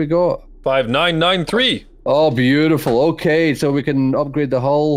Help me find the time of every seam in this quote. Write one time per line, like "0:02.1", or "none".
0:01.9